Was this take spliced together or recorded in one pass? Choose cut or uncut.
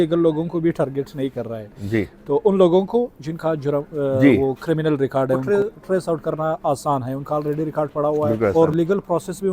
cut